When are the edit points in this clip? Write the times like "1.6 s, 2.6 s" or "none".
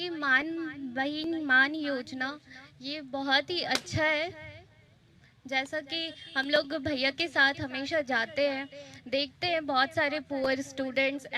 none